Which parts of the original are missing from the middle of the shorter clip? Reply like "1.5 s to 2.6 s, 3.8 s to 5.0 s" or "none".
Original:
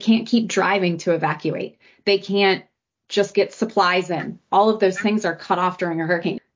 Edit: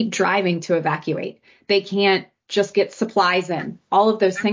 2.7 s to 3.0 s